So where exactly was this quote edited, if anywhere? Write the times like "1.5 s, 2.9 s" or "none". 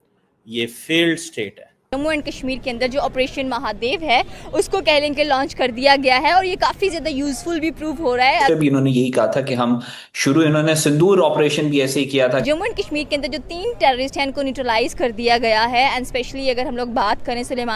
1.9 s, 8.5 s, 12.4 s